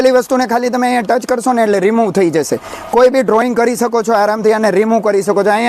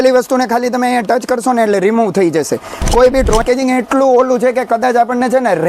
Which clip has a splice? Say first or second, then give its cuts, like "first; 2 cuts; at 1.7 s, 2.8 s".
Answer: second; 1 cut; at 3.4 s